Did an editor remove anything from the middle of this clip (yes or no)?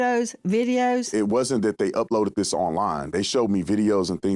yes